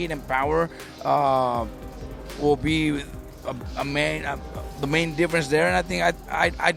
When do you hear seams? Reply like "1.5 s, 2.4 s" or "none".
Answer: none